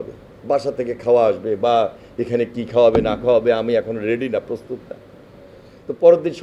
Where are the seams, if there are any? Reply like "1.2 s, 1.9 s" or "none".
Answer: none

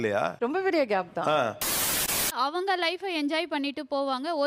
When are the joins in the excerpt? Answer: 1.9 s

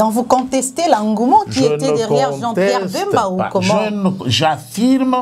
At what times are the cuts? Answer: none

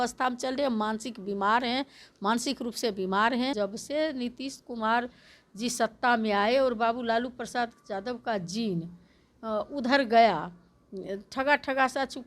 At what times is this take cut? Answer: 3.5 s

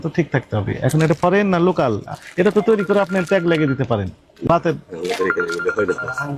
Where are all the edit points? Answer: none

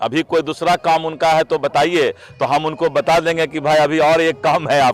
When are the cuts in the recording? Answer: none

